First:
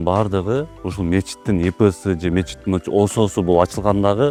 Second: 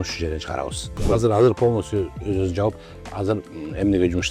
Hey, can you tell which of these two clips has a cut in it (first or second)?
second